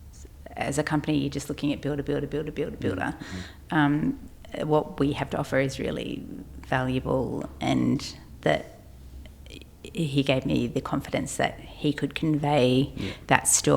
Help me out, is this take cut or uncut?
uncut